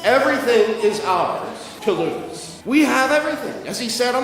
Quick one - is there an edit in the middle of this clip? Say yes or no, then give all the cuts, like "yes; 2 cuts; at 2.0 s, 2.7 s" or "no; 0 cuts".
yes; 2 cuts; at 1.7 s, 2.5 s